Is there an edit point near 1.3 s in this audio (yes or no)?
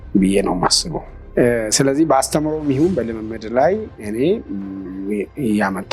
yes